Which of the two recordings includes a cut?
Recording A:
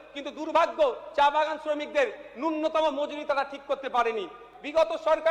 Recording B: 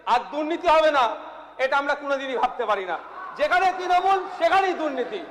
A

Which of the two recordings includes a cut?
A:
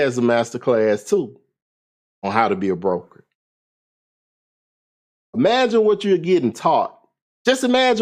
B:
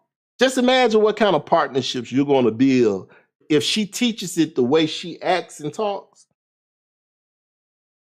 B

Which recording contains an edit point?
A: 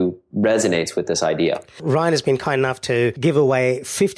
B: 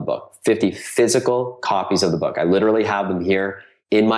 A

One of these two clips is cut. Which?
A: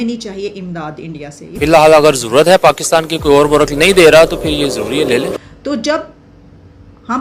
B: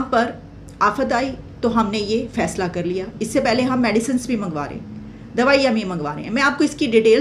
A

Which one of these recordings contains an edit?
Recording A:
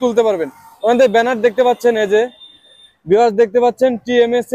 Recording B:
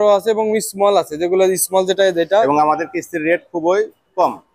B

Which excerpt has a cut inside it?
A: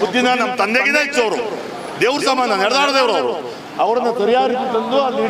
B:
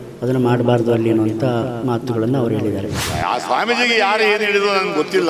B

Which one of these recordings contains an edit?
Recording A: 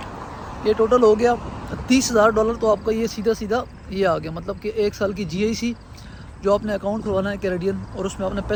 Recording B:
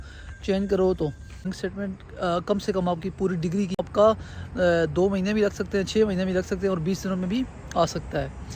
B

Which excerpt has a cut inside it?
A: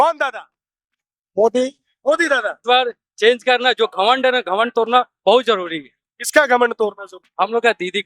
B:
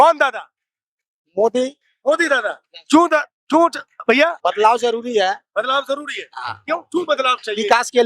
A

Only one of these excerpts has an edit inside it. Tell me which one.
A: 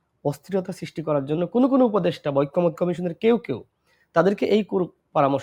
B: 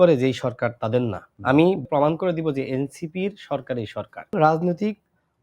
B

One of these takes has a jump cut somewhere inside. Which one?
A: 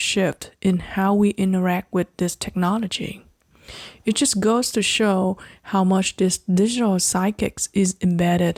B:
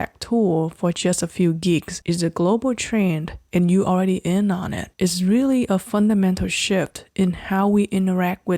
B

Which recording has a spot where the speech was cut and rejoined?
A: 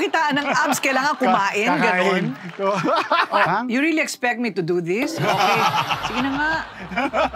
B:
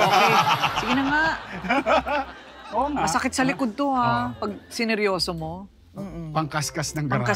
A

